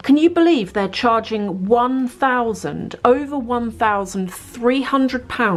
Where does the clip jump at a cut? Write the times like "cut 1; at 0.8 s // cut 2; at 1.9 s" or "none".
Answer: none